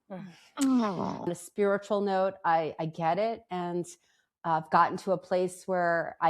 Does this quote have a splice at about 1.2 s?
yes; 1 cut; at 1.2 s

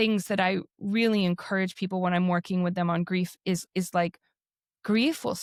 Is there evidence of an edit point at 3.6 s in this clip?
no; 0 cuts

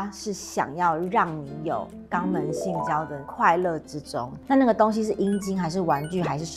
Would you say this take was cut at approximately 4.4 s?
yes; 2 cuts; at 2.0 s, 4.4 s

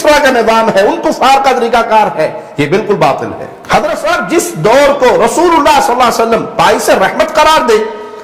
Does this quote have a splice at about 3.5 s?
yes; 1 cut; at 3.5 s

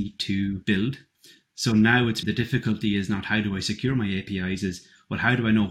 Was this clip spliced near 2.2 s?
yes; 1 cut; at 2.2 s

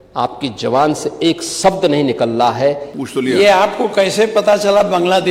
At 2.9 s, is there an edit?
yes; 1 cut; at 2.9 s

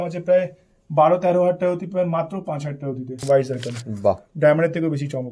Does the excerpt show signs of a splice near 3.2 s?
yes; 1 cut; at 3.2 s

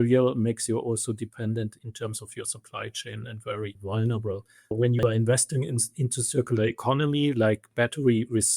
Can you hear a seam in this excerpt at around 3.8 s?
yes; 3 cuts; at 1.8 s, 3.8 s, 4.7 s

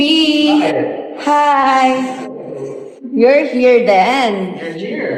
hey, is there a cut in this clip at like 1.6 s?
no; 0 cuts

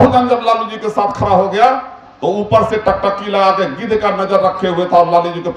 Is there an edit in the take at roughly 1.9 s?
no; 0 cuts

